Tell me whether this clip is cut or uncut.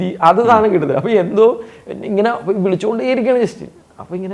uncut